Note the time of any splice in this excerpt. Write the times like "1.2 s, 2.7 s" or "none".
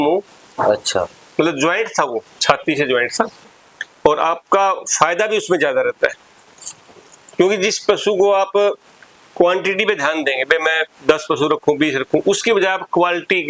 3.5 s